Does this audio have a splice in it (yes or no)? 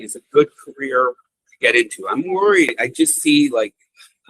yes